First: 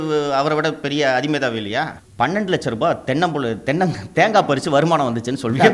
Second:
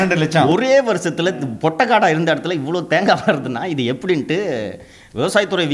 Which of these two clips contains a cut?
first; 1 cut; at 2.0 s

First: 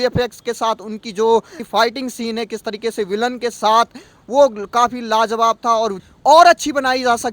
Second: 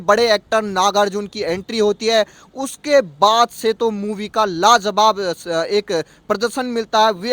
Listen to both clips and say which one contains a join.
first; 2 cuts; at 1.6 s, 6.0 s

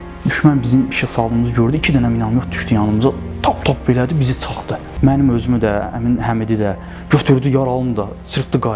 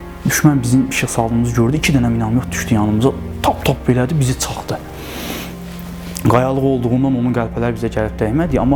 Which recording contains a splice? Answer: first; 1 cut; at 4.9 s

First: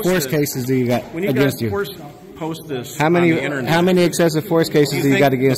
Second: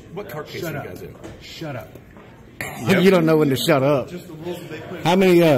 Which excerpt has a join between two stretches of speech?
second; 1 cut; at 2.7 s

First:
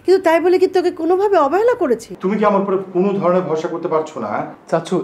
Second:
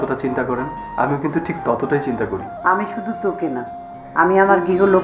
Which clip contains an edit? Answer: first; 1 cut; at 2.1 s

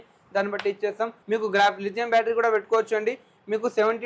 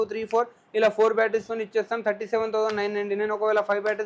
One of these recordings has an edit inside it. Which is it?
first; 1 cut; at 1.2 s

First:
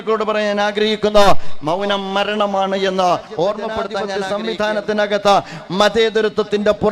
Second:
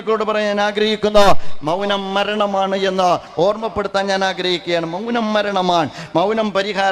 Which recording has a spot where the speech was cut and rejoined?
first; 1 cut; at 4.1 s

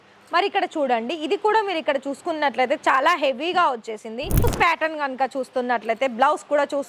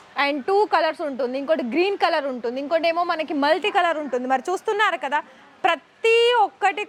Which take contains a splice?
first; 1 cut; at 4.4 s

